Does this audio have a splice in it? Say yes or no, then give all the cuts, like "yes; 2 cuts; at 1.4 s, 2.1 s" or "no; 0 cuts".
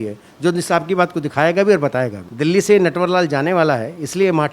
yes; 1 cut; at 2.2 s